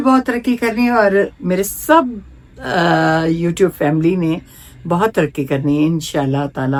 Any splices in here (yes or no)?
no